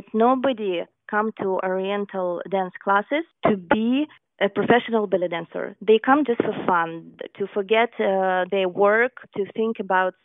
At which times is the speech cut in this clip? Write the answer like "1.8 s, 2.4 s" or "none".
3.3 s, 4.2 s, 9.3 s